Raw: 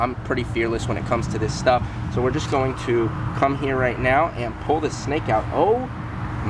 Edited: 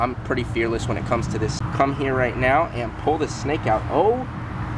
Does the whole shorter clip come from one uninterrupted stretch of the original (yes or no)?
no